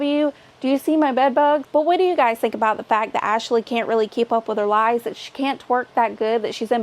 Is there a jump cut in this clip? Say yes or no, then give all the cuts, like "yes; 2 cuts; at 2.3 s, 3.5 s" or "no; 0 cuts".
yes; 1 cut; at 1.7 s